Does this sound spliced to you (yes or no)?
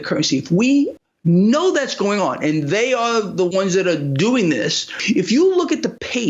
yes